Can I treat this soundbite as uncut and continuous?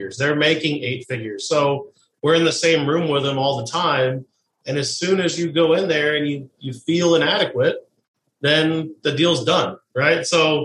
yes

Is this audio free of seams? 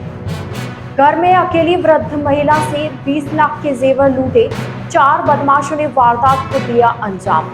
no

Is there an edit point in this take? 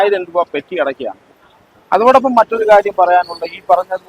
yes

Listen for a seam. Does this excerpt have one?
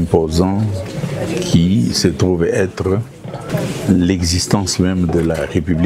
yes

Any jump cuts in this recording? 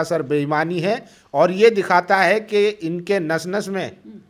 no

